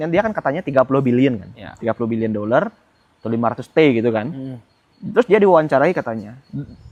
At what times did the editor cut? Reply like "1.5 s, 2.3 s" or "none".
none